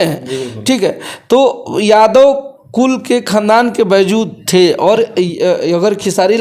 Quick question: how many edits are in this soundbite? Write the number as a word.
zero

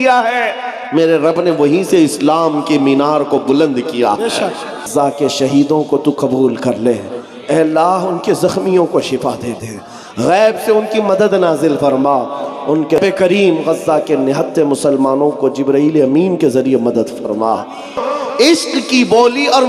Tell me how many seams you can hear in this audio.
three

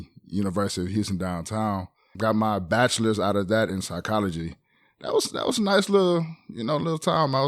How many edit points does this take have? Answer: one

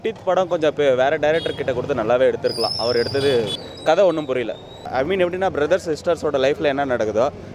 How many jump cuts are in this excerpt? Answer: two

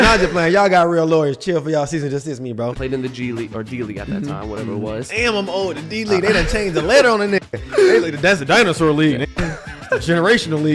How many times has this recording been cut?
one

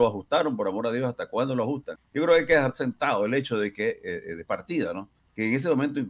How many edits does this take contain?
two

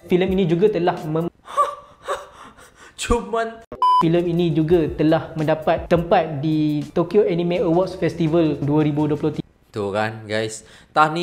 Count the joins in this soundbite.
one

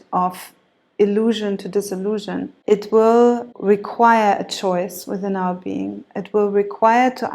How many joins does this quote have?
two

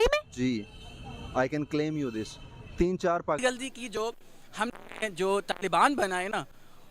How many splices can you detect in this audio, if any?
one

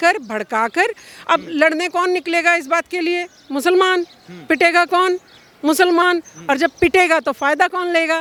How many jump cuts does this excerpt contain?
zero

